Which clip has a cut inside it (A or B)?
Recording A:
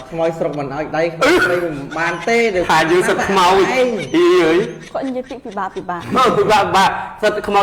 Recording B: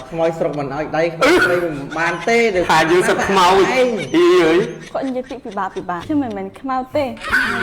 B